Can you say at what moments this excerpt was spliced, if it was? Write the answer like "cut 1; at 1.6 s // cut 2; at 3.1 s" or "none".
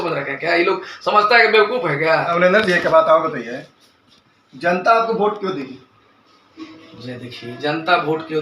cut 1; at 2.3 s